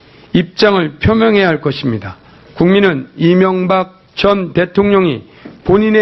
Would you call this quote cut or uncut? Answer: uncut